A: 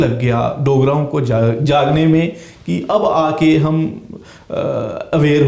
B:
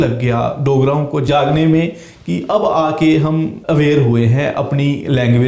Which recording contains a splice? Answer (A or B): B